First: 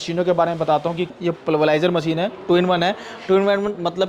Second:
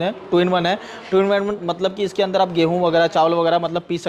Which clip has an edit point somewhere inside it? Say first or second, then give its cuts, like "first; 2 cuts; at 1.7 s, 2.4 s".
first; 1 cut; at 1.1 s